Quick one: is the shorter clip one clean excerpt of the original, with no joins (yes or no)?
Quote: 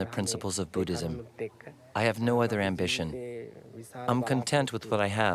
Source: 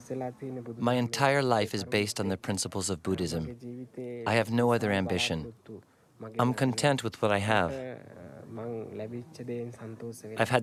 yes